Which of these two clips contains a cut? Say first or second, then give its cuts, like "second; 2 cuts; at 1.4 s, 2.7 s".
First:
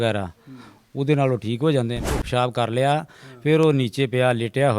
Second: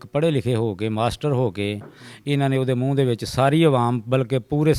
first; 1 cut; at 2.2 s